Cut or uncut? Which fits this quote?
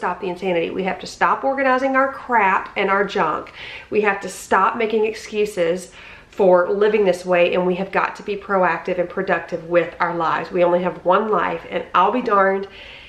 uncut